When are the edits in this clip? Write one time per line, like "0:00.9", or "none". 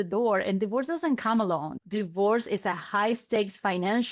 0:01.7